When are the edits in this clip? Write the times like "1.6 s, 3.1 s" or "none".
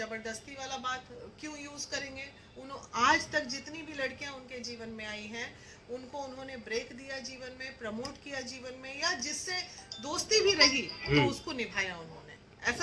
none